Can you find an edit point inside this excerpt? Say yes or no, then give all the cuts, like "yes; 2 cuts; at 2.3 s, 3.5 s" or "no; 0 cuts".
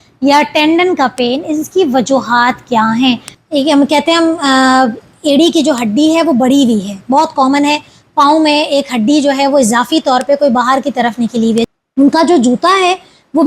yes; 2 cuts; at 3.3 s, 11.6 s